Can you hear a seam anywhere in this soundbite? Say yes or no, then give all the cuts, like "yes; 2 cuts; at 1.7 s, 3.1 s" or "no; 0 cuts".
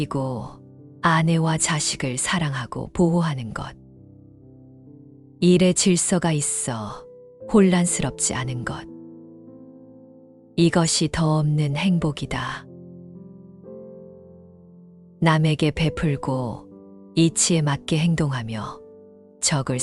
yes; 4 cuts; at 3.8 s, 5.4 s, 8.8 s, 10.5 s